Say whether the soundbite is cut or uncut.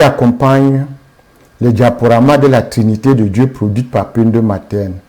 cut